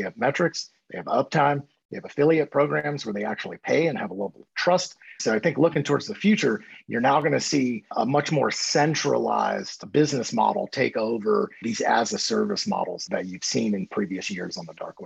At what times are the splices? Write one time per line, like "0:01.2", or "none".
0:11.7